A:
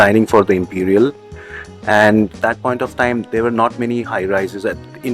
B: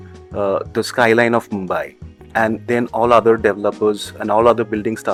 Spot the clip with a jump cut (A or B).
A